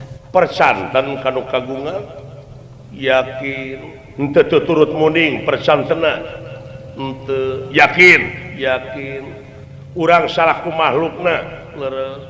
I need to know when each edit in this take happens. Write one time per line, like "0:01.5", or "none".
none